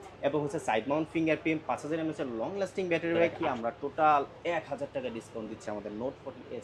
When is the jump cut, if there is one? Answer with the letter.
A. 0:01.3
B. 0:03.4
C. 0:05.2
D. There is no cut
B